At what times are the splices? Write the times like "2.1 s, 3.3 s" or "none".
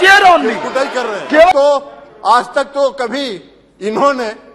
1.5 s